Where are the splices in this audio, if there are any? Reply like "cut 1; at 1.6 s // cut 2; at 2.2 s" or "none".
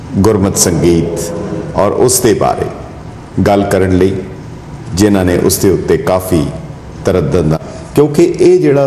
cut 1; at 7.6 s